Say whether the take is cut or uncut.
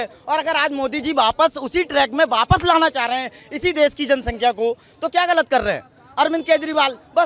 uncut